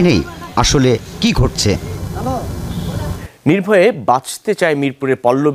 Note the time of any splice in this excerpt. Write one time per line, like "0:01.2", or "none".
0:03.2